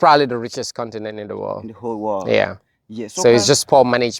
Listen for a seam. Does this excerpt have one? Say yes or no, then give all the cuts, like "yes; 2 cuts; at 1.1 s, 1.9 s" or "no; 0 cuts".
no; 0 cuts